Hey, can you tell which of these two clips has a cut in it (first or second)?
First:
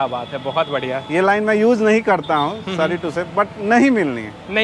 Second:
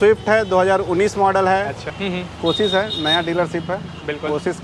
second